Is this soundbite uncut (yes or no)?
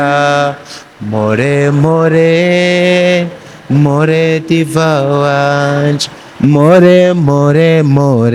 yes